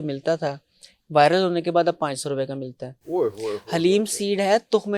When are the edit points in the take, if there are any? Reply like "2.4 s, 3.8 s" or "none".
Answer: none